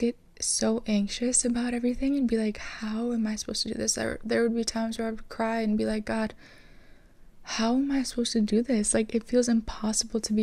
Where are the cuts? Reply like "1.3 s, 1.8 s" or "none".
none